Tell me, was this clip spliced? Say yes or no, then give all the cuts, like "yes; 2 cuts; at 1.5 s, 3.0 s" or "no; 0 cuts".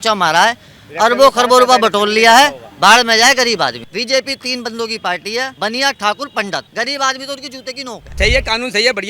yes; 4 cuts; at 3.8 s, 5.5 s, 6.7 s, 8.1 s